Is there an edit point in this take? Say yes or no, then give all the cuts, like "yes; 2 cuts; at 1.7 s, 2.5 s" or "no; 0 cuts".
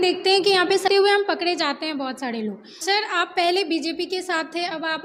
yes; 2 cuts; at 0.9 s, 2.8 s